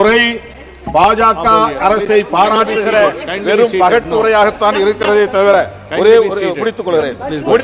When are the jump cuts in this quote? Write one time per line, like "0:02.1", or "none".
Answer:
none